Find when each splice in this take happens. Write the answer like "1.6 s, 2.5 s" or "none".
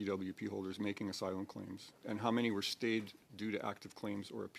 none